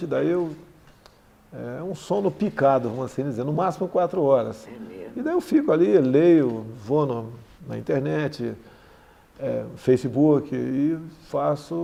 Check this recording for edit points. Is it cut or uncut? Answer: uncut